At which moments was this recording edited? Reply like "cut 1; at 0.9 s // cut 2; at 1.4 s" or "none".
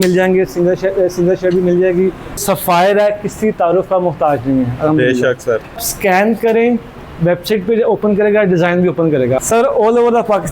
cut 1; at 2.4 s // cut 2; at 5.9 s // cut 3; at 9.4 s